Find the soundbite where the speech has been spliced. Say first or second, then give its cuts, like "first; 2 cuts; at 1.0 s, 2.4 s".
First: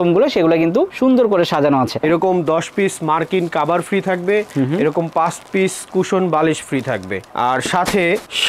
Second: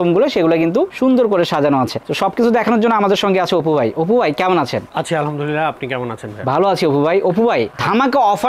first; 1 cut; at 2.0 s